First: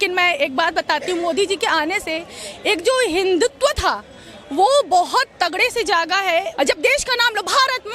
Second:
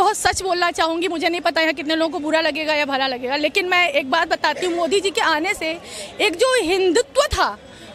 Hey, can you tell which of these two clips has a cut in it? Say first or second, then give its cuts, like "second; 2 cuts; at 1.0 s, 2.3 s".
first; 1 cut; at 6.5 s